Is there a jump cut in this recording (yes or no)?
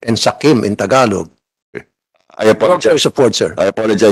no